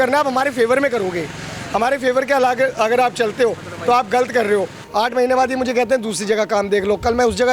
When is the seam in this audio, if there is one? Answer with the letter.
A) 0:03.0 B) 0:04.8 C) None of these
B